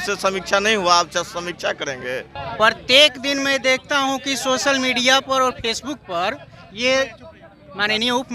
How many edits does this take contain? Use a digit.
1